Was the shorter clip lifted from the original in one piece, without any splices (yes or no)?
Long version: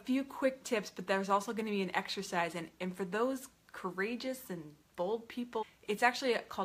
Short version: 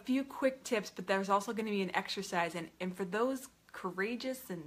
yes